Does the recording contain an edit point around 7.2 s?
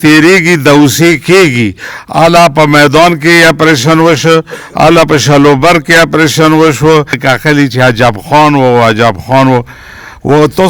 yes; 1 cut; at 7.2 s

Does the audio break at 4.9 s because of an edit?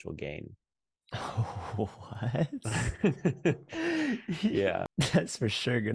yes; 1 cut; at 4.9 s

